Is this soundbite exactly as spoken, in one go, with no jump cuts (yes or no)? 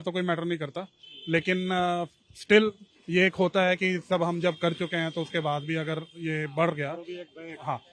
yes